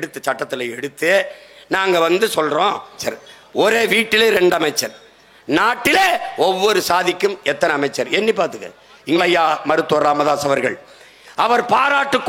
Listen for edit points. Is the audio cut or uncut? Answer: cut